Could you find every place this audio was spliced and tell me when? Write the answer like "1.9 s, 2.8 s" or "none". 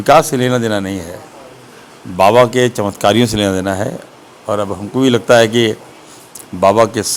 none